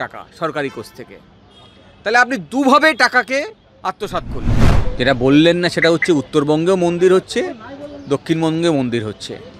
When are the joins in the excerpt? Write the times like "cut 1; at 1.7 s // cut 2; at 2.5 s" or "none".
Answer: cut 1; at 4.7 s